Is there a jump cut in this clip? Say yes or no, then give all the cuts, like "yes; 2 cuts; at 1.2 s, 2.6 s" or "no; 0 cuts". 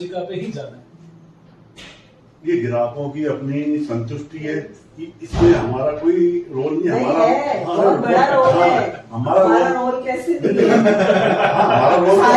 no; 0 cuts